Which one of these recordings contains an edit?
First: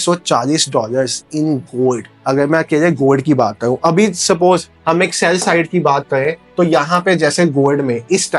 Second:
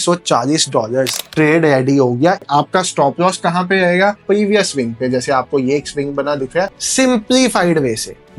second; 4 cuts; at 1.2 s, 2.4 s, 4.2 s, 6.7 s

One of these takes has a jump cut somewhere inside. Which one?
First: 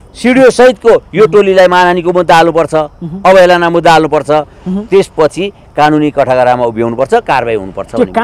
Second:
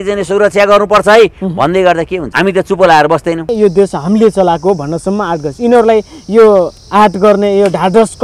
second; 2 cuts; at 2.2 s, 3.5 s

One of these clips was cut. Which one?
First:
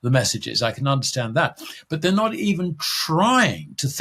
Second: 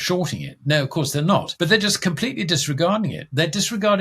second; 1 cut; at 1.5 s

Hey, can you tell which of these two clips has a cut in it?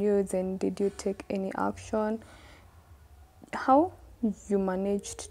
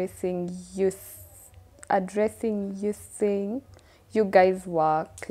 first; 1 cut; at 2.6 s

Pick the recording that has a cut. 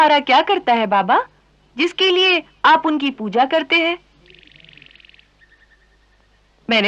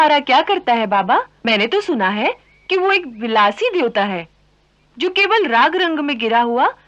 second; 1 cut; at 1.3 s

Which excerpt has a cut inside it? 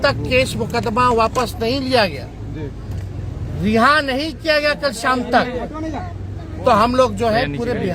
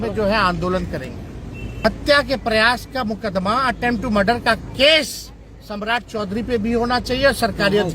second; 1 cut; at 1.8 s

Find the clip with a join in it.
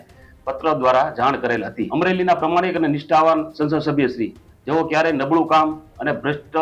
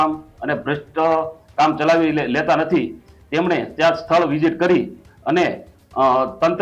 first; 1 cut; at 1.8 s

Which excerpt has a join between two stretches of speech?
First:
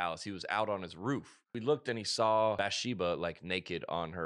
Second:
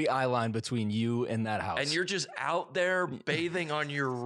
first; 2 cuts; at 1.5 s, 2.6 s

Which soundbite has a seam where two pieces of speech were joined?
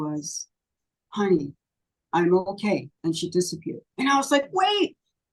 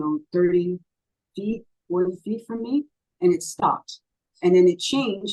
first; 2 cuts; at 2.9 s, 3.8 s

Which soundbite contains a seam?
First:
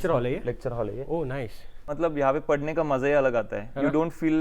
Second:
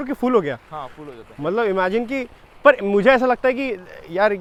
first; 1 cut; at 1.9 s

